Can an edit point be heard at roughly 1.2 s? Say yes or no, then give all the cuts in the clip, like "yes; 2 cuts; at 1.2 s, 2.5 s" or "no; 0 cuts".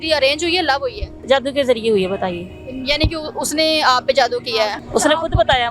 yes; 2 cuts; at 1.2 s, 4.8 s